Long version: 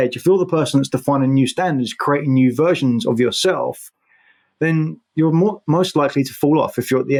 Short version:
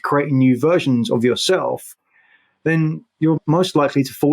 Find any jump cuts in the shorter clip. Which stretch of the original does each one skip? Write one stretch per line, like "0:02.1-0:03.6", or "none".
0:05.3-0:05.6